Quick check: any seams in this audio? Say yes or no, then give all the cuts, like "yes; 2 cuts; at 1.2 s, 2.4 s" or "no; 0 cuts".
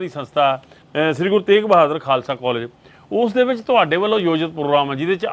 no; 0 cuts